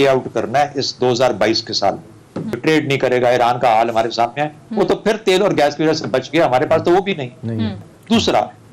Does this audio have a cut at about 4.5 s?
no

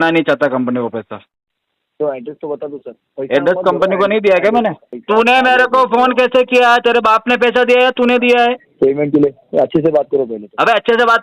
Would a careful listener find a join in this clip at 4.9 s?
yes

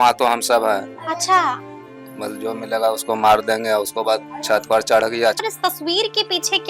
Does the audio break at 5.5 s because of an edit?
yes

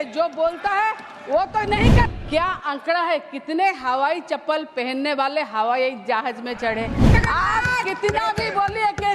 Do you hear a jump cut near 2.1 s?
yes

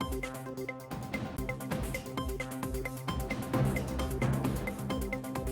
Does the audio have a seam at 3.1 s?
no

